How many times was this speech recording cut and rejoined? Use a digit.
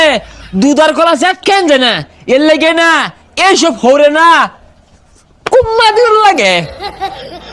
1